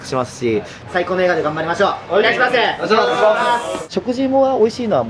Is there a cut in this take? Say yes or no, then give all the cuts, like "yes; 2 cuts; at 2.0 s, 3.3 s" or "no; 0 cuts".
yes; 2 cuts; at 0.9 s, 3.8 s